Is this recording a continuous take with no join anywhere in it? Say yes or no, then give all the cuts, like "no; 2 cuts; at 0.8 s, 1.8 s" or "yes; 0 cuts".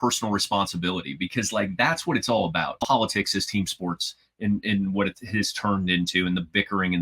no; 1 cut; at 2.8 s